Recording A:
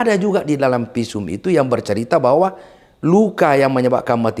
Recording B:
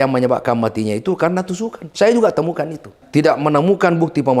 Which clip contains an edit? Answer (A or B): B